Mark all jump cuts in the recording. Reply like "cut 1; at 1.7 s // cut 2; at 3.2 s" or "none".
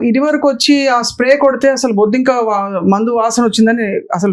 none